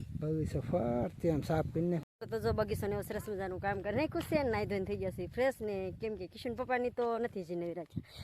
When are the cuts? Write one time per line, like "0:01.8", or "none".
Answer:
0:02.1

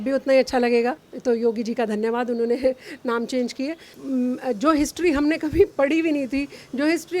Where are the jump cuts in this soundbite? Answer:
0:01.1
0:03.9

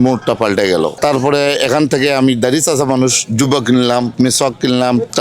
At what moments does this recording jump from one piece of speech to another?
0:01.0

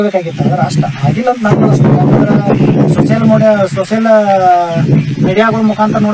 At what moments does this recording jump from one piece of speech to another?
none

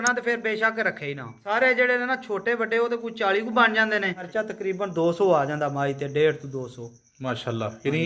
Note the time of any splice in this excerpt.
0:01.3
0:04.2

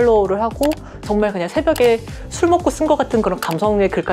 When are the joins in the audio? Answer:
0:01.0

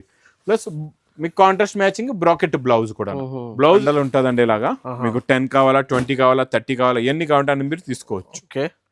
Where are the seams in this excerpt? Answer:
0:03.8

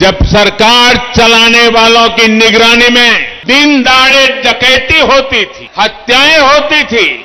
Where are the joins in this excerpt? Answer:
0:03.3
0:05.6

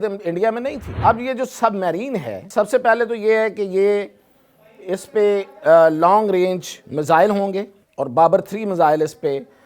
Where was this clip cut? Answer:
0:00.9
0:02.4
0:07.8

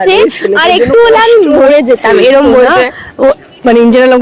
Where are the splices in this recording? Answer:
none

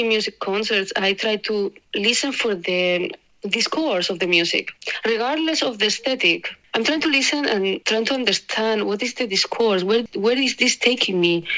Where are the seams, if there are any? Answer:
0:10.1

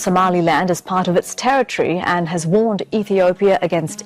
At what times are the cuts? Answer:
none

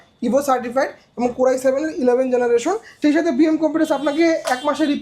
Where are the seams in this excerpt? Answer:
0:02.9

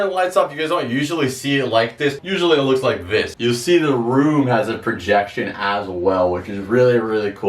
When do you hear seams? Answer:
0:02.2
0:03.3

